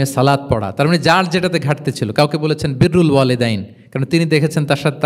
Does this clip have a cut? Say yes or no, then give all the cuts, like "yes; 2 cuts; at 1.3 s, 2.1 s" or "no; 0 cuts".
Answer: no; 0 cuts